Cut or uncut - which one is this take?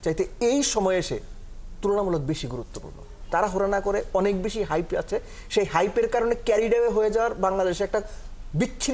cut